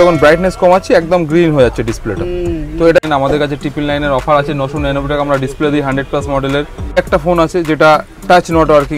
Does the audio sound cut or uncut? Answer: cut